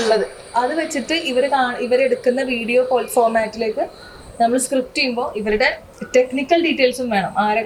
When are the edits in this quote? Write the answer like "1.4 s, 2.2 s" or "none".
none